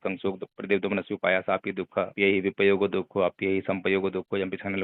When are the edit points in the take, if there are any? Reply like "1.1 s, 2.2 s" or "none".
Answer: 2.1 s